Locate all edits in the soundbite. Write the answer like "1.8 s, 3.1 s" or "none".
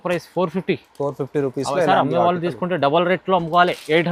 none